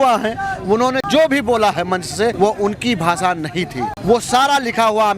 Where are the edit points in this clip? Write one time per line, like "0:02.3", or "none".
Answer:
0:01.0
0:02.3
0:04.0